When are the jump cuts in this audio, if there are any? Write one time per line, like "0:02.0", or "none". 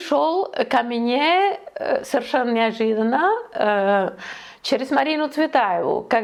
none